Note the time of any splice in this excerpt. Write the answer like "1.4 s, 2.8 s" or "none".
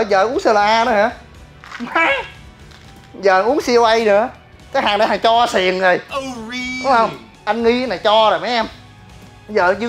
none